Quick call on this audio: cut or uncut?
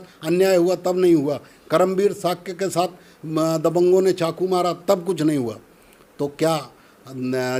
uncut